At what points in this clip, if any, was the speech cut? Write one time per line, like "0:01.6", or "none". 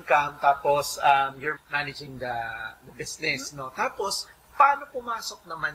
0:01.5